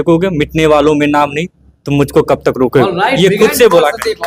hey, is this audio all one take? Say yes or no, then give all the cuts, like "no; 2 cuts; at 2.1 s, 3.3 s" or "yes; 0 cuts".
yes; 0 cuts